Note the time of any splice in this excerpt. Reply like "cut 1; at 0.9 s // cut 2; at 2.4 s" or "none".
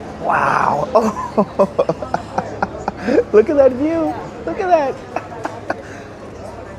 none

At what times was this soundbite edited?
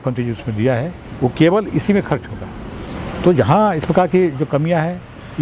none

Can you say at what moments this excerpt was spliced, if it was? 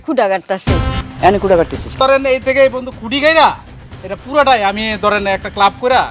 cut 1; at 1.0 s // cut 2; at 1.9 s

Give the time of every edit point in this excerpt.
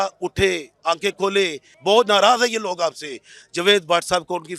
cut 1; at 1.7 s

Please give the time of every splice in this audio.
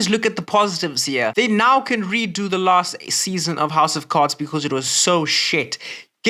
cut 1; at 1.3 s

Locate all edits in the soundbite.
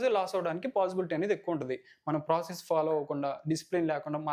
none

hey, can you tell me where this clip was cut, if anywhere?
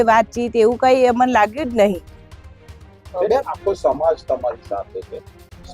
none

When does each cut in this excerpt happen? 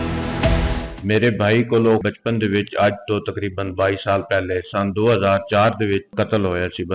cut 1; at 0.9 s // cut 2; at 2.0 s // cut 3; at 6.1 s

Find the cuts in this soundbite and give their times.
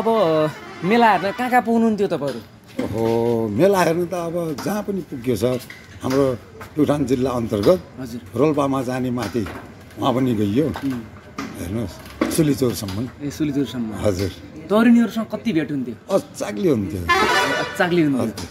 none

